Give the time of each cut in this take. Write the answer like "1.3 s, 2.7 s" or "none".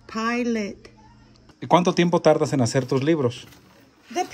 1.5 s